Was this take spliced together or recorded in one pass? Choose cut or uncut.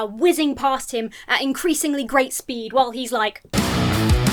uncut